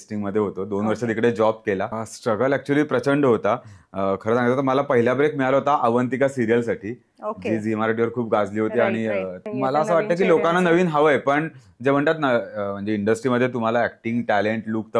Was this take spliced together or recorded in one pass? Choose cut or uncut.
cut